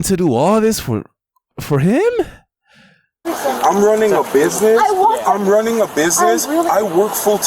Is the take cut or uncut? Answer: cut